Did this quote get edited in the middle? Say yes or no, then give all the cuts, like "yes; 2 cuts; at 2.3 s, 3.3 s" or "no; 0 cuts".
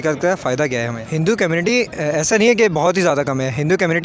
yes; 1 cut; at 1.0 s